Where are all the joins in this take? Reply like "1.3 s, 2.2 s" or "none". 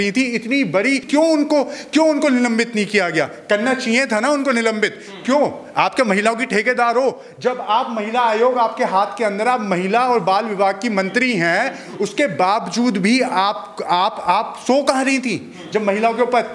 none